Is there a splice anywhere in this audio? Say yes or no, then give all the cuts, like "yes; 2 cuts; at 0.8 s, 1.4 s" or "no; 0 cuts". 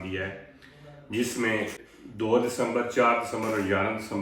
yes; 1 cut; at 1.8 s